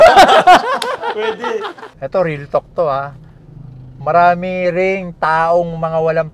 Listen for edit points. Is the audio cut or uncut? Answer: cut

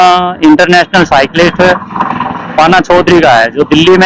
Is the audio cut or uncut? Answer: uncut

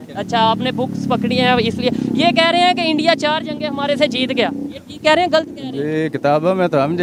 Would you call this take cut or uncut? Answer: uncut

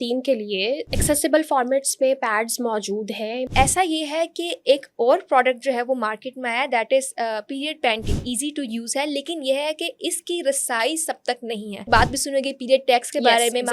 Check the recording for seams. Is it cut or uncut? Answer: cut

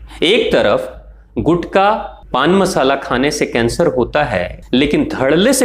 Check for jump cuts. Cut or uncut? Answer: cut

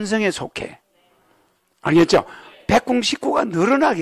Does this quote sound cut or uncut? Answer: uncut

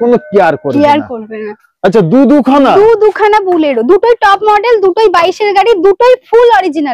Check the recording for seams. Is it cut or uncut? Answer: uncut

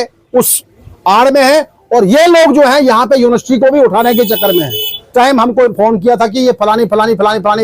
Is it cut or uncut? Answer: cut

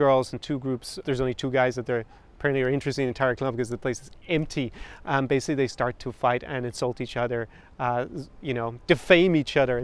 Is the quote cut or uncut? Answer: cut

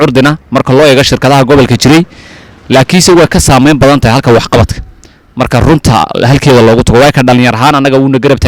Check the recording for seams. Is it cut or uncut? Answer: uncut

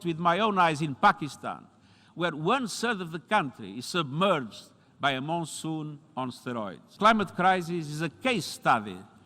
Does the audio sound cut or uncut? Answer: cut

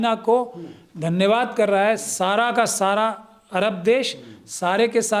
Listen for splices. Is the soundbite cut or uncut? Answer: uncut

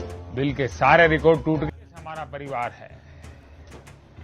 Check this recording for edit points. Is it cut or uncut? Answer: cut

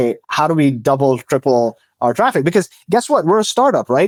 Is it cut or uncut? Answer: uncut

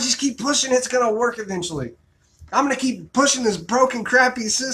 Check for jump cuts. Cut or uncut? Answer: cut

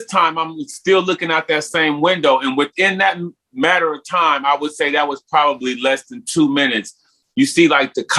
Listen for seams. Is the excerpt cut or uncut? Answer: uncut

